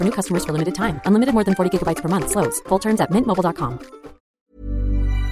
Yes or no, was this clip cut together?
yes